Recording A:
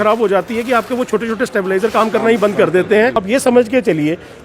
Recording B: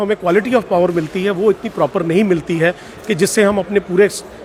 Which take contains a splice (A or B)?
A